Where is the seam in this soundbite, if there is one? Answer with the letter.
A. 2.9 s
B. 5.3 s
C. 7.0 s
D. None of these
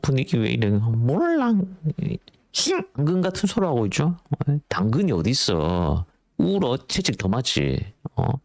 A